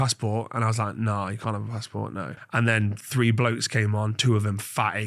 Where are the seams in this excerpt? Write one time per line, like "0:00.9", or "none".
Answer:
0:02.4